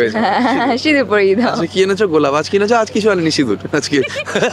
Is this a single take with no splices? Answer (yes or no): yes